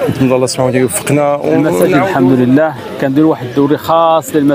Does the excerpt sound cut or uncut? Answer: cut